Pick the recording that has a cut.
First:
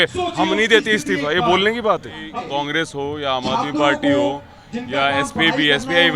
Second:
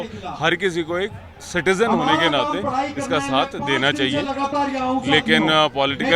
first; 1 cut; at 2.4 s

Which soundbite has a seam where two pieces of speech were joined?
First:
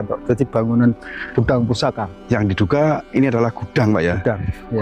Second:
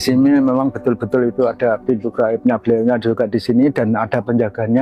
first; 1 cut; at 1.2 s

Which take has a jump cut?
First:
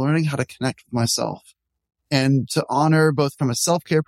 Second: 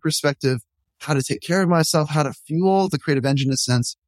second; 1 cut; at 1.0 s

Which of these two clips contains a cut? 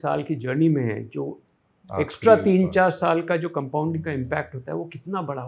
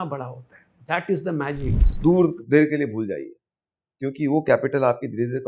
second; 1 cut; at 1.9 s

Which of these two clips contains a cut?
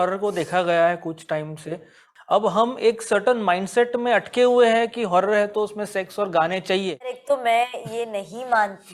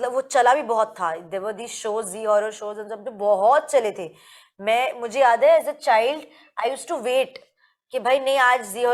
first; 2 cuts; at 2.0 s, 7.2 s

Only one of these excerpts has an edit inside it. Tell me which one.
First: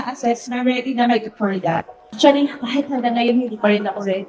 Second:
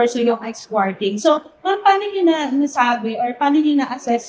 first; 1 cut; at 2.0 s

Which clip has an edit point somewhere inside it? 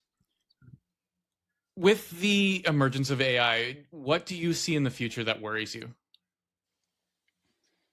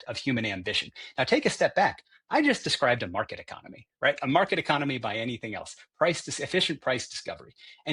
first; 1 cut; at 1.6 s

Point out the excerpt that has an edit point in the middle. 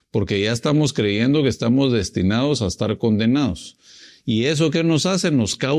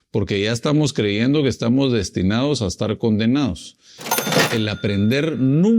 second; 1 cut; at 4.4 s

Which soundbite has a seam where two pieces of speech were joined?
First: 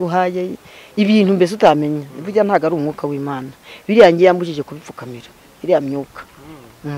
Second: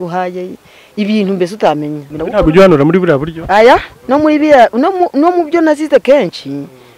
second; 1 cut; at 2.1 s

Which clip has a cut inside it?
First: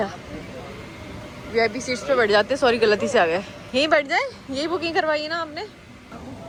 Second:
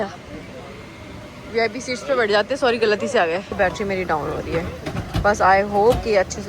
second; 1 cut; at 3.5 s

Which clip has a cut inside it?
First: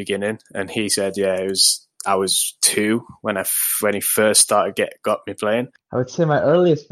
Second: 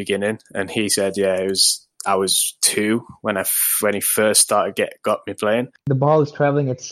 second; 1 cut; at 5.8 s

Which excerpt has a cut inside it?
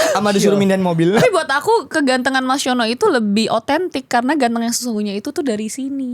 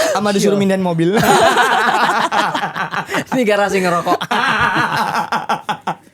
first; 1 cut; at 1.2 s

